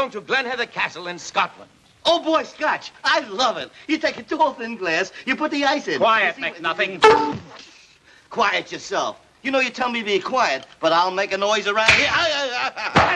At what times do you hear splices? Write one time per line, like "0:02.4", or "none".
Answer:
0:05.5